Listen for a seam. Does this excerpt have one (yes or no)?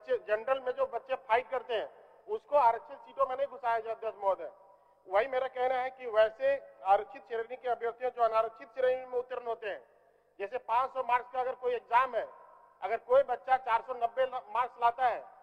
no